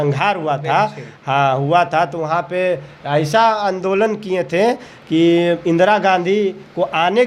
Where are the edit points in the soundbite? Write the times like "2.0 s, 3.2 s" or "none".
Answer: none

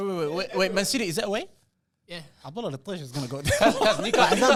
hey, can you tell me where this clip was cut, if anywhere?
none

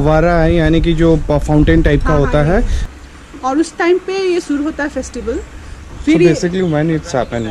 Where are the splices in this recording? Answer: 2.8 s

